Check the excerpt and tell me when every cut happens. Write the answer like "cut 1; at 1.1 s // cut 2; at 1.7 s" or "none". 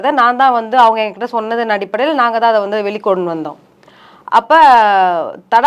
none